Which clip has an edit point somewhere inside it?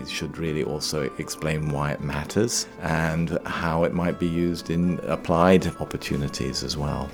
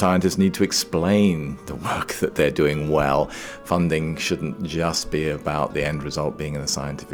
first; 3 cuts; at 2.7 s, 5.0 s, 5.8 s

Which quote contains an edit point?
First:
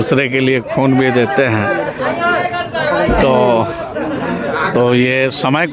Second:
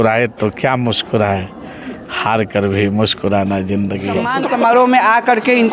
second; 1 cut; at 4.3 s

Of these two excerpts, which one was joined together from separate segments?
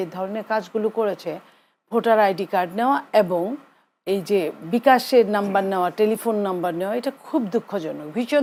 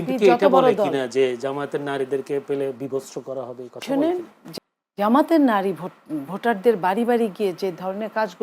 second; 1 cut; at 4.4 s

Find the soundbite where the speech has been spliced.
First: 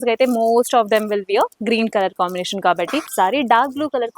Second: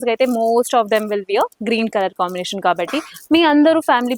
first; 1 cut; at 3.1 s

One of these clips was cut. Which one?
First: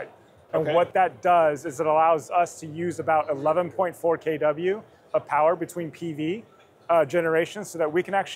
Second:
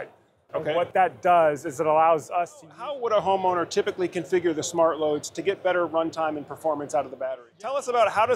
second; 2 cuts; at 2.8 s, 7.3 s

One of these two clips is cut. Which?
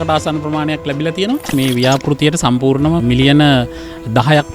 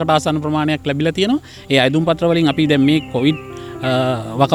first; 2 cuts; at 1.5 s, 3.0 s

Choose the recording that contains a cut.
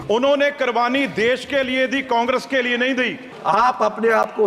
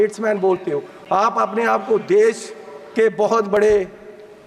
first; 1 cut; at 3.3 s

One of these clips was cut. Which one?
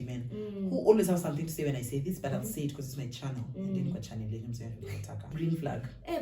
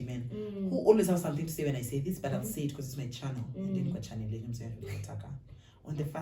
first; 1 cut; at 5.3 s

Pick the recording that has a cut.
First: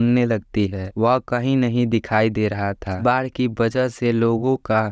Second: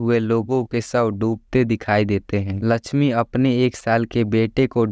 first; 1 cut; at 3.0 s

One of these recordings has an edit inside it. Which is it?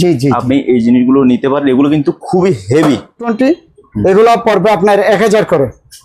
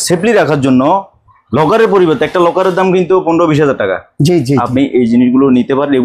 first; 1 cut; at 3.3 s

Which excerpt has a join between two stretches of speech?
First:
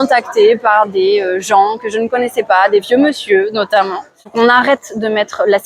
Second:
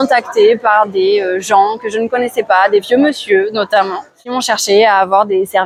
first; 1 cut; at 4.2 s

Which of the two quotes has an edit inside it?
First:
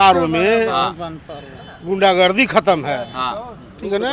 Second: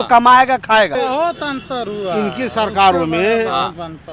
second; 1 cut; at 1.0 s

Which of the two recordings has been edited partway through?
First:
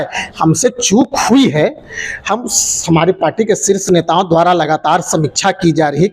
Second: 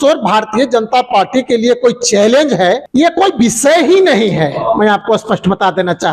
second; 1 cut; at 2.8 s

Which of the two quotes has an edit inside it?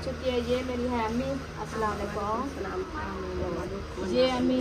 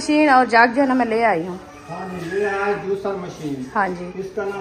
first; 1 cut; at 2.9 s

